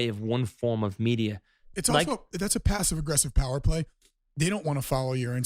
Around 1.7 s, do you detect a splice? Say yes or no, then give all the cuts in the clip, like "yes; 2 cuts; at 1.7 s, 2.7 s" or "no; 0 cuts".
yes; 1 cut; at 1.7 s